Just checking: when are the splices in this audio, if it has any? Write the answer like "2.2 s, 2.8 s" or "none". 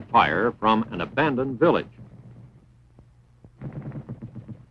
1.7 s